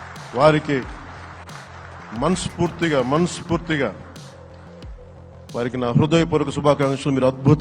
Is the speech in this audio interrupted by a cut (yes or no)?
yes